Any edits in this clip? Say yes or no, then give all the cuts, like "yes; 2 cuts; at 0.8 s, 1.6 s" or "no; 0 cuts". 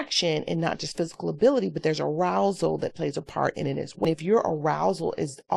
yes; 1 cut; at 4.1 s